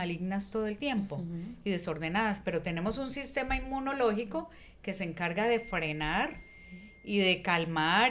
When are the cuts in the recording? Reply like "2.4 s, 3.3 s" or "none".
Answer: none